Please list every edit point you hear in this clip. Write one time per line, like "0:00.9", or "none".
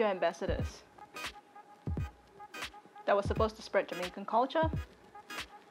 0:04.7